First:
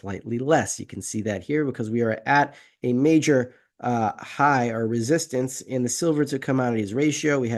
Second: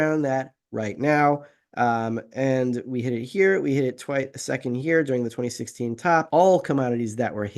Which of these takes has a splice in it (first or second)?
second